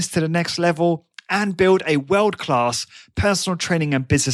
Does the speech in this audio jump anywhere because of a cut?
no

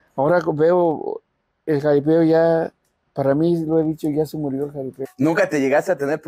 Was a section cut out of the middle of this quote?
yes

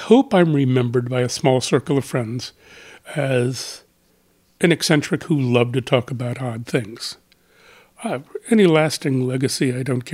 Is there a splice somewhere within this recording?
no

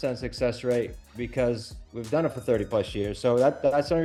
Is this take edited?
no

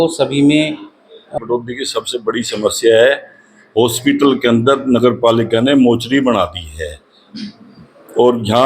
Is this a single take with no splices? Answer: no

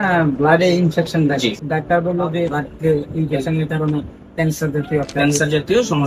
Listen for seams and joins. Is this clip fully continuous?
no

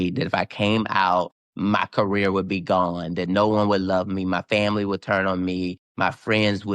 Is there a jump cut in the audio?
yes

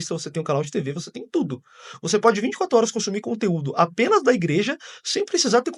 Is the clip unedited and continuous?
yes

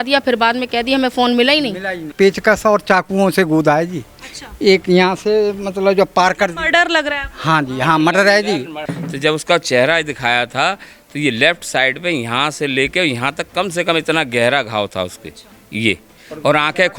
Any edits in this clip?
yes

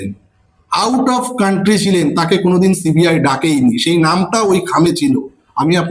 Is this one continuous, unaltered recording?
yes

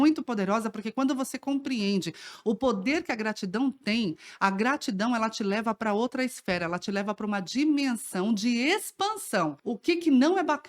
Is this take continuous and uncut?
no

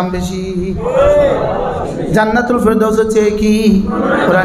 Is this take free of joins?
no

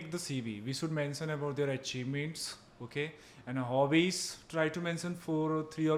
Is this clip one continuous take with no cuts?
yes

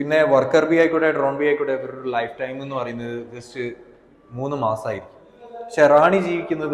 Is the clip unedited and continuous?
yes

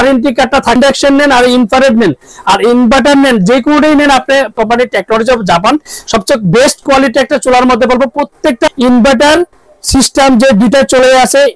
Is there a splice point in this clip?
yes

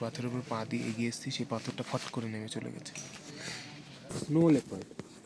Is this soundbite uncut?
no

